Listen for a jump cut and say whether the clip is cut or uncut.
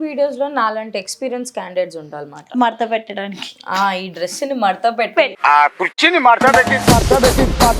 uncut